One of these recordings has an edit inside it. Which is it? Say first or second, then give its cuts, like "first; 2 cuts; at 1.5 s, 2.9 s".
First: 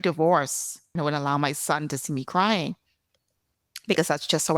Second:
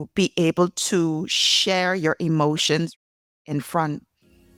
first; 1 cut; at 0.9 s